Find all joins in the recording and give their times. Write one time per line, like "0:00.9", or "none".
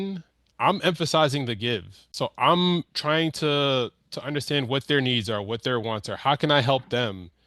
0:02.0